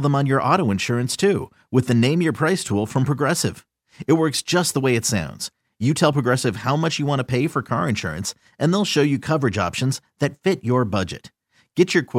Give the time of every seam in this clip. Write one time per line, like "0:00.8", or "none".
none